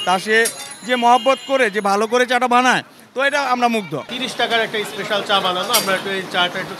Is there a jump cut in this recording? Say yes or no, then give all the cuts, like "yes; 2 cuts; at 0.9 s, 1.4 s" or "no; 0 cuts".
yes; 1 cut; at 4.1 s